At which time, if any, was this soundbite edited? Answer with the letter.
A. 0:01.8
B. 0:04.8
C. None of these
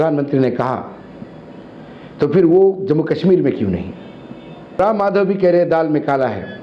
B